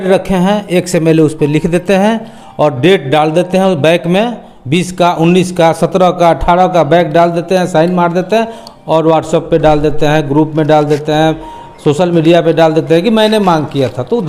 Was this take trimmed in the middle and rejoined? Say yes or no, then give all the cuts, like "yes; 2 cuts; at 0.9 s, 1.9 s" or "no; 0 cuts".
no; 0 cuts